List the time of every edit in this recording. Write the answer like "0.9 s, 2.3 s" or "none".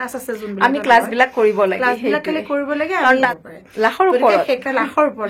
3.3 s

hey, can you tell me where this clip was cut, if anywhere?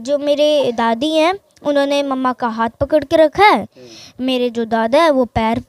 none

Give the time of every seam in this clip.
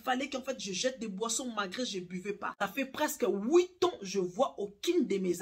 2.5 s

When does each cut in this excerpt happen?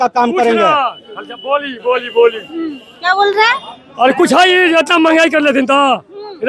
none

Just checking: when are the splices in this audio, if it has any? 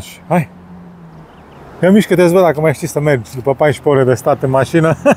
none

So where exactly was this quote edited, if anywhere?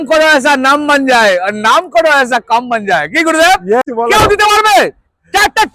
3.8 s

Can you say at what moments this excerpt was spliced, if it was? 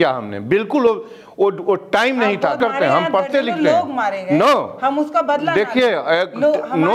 2.6 s

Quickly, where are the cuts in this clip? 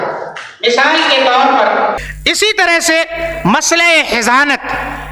2.1 s

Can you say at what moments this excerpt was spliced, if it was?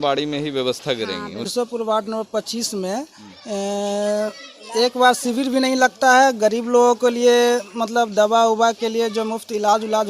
1.5 s

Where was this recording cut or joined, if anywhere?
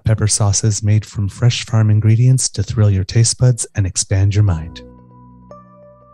4.7 s

